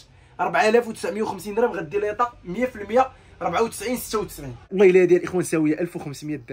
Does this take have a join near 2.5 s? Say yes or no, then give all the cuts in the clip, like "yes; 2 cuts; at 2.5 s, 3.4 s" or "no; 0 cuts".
no; 1 cut; at 4.7 s